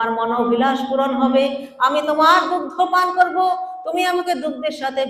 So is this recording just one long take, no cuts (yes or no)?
yes